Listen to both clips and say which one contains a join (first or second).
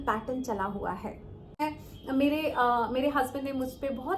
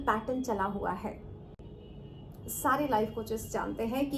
first